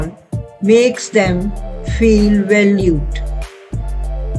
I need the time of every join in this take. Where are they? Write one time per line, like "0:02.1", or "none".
0:03.1